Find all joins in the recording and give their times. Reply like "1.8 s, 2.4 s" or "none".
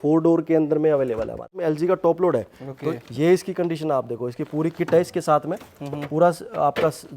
1.6 s

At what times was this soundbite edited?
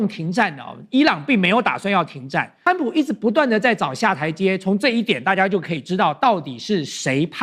2.6 s

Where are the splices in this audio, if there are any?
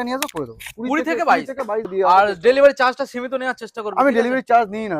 1.8 s

